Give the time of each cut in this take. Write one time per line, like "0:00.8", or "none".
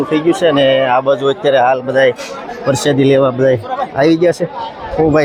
none